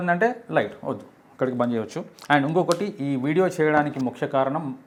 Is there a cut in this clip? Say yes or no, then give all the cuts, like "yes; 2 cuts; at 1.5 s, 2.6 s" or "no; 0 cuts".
no; 0 cuts